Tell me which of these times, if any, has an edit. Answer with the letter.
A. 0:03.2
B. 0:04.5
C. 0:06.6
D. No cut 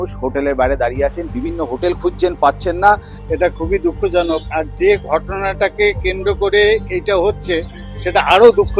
A